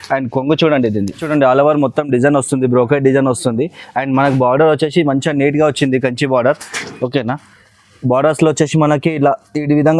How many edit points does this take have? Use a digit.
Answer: 1